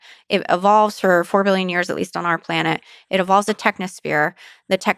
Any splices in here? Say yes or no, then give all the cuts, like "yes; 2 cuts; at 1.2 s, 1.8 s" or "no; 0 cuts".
no; 0 cuts